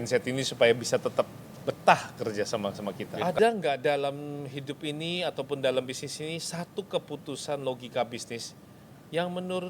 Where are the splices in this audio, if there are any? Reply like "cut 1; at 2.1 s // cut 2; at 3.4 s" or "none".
cut 1; at 3.1 s